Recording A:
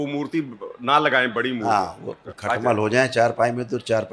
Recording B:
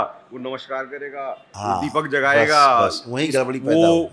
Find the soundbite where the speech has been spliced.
A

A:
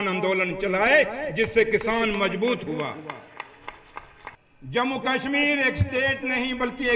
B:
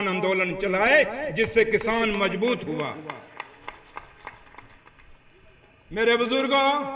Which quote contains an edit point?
A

